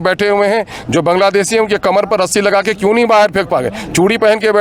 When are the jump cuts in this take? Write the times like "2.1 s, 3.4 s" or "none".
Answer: none

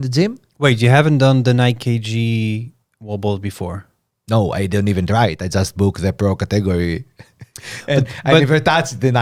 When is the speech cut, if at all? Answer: none

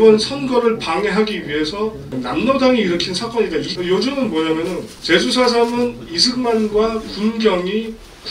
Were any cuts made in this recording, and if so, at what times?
3.7 s, 4.9 s

